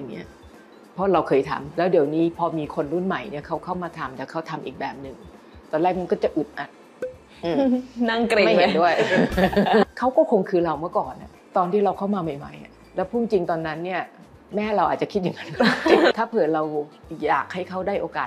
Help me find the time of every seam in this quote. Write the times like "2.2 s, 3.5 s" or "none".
1.6 s, 9.9 s, 16.1 s